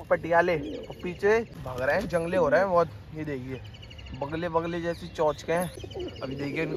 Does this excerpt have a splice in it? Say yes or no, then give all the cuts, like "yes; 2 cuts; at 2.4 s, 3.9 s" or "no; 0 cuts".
yes; 2 cuts; at 1.6 s, 5.8 s